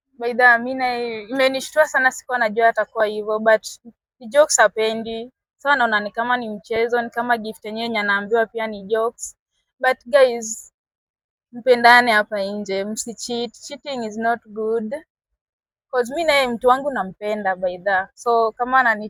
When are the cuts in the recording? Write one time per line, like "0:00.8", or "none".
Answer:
none

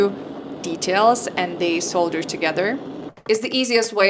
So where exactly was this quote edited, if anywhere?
0:02.9

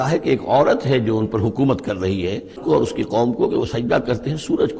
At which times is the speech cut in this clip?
0:02.6

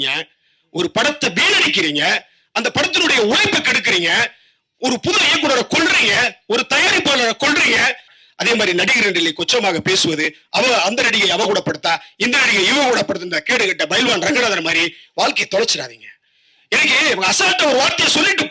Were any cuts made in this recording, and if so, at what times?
0:08.1

